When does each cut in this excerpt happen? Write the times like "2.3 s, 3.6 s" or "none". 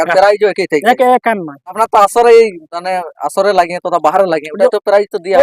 1.8 s